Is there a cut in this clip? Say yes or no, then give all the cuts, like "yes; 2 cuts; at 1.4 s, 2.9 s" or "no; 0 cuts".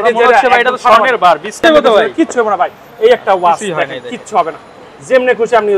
yes; 1 cut; at 1.6 s